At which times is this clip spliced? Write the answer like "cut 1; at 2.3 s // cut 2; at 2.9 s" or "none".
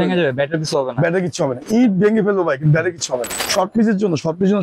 cut 1; at 3.3 s